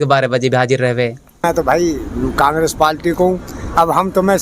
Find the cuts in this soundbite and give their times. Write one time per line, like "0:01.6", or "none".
0:01.4